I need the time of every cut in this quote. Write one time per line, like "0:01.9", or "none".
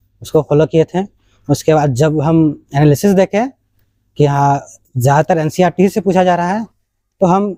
none